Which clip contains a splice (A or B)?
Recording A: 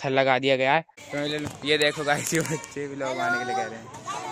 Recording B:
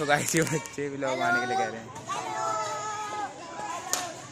A